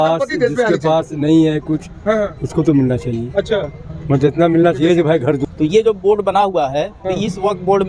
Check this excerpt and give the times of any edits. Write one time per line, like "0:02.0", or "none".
0:05.4